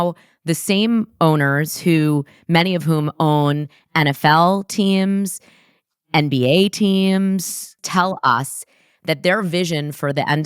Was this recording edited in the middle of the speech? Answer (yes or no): yes